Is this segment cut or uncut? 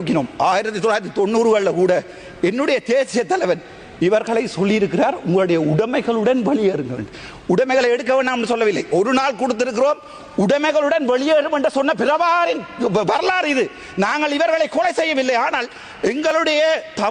uncut